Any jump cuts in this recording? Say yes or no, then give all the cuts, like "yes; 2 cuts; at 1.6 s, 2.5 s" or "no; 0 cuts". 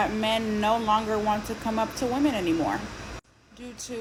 no; 0 cuts